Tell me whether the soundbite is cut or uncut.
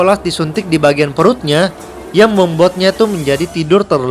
uncut